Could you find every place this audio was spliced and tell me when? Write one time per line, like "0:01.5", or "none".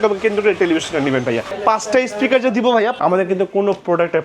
0:01.5
0:02.9